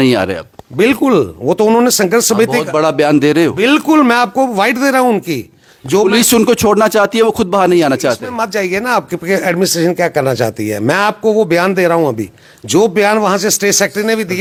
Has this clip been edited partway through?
no; 0 cuts

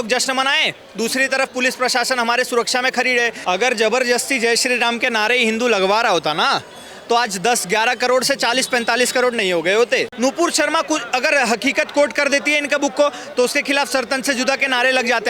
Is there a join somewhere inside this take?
yes; 2 cuts; at 3.4 s, 10.1 s

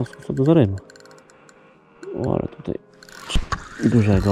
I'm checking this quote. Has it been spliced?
yes; 1 cut; at 3.3 s

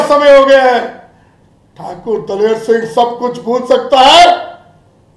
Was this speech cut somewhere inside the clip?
no; 0 cuts

